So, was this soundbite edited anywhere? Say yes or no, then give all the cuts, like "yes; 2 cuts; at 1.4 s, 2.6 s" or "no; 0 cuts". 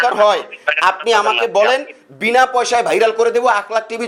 no; 0 cuts